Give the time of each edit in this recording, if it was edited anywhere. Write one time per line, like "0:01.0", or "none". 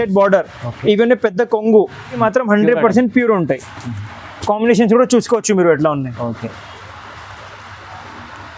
0:02.2